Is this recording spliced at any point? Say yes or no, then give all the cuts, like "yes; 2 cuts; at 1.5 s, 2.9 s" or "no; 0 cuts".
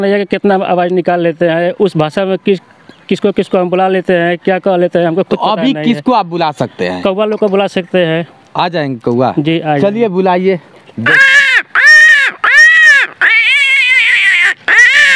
no; 0 cuts